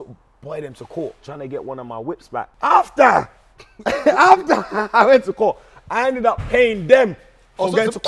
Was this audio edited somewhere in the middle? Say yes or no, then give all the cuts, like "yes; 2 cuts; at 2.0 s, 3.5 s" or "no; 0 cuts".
yes; 2 cuts; at 1.3 s, 2.5 s